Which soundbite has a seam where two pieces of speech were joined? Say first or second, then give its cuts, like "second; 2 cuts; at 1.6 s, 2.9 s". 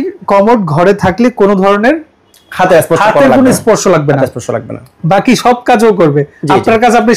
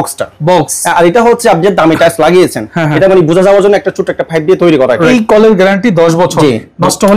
second; 1 cut; at 5.1 s